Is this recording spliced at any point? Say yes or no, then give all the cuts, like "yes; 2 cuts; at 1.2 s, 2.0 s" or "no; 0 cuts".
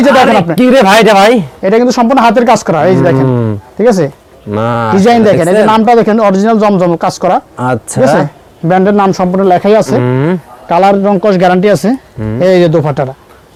no; 0 cuts